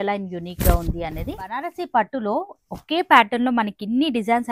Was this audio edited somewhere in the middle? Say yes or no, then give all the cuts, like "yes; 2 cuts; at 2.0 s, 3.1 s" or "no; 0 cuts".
yes; 1 cut; at 1.7 s